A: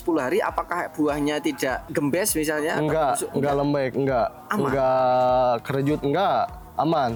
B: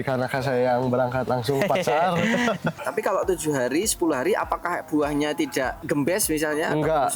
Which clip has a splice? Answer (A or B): B